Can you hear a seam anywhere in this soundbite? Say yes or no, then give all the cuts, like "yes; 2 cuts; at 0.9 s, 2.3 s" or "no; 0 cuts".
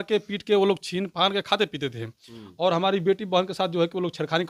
no; 0 cuts